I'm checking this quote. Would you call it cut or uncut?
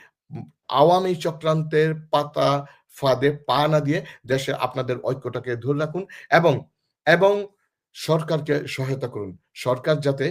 uncut